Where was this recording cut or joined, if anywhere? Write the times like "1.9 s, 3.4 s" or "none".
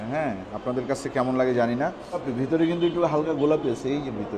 2.3 s